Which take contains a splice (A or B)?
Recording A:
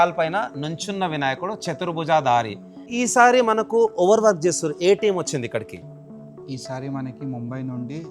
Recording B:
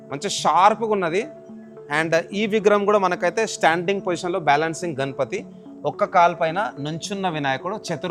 A